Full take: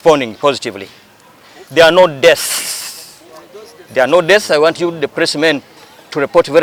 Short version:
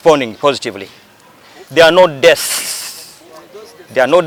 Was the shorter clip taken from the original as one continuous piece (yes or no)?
yes